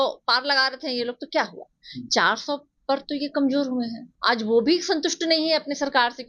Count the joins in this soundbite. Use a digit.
1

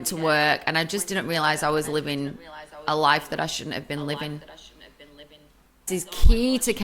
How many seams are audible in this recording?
1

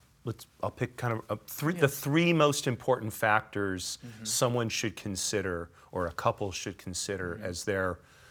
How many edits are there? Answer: 0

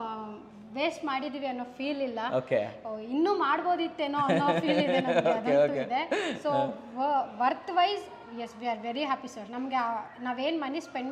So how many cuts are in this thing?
0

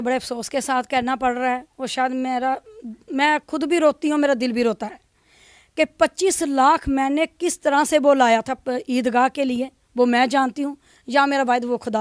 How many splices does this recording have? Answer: 0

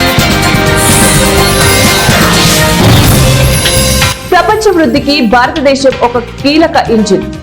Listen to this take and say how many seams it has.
1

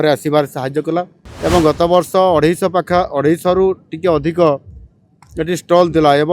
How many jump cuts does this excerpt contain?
1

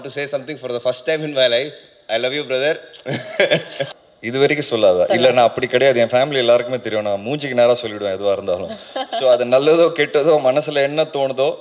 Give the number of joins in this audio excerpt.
1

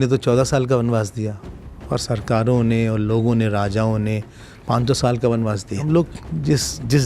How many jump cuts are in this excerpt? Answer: 1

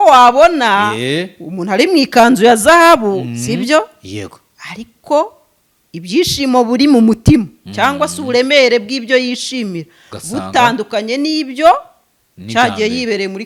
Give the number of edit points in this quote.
0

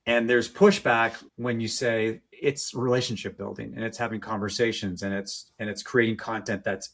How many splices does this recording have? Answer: 2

